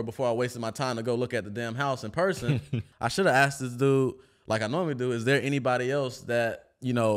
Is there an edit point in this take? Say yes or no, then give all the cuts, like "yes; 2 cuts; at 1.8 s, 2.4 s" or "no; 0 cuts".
yes; 1 cut; at 2.9 s